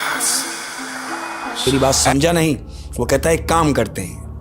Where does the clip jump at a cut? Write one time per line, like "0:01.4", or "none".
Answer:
0:01.6

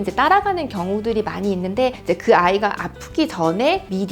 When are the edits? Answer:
0:02.0

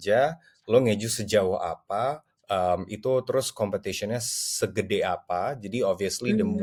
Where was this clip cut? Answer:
none

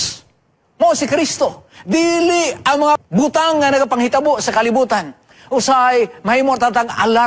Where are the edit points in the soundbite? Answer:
0:03.0

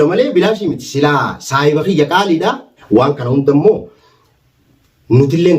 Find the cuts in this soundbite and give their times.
0:02.7

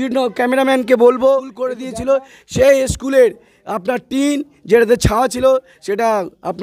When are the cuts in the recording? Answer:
0:01.8

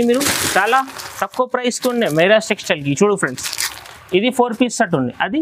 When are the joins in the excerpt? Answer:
none

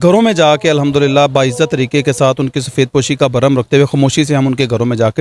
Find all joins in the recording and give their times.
none

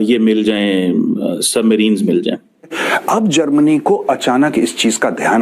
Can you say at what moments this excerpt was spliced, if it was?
0:02.9

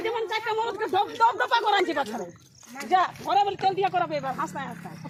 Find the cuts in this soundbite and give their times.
none

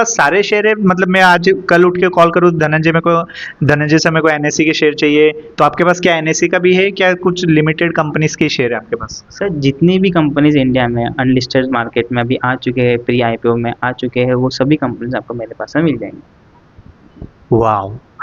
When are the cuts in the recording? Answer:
none

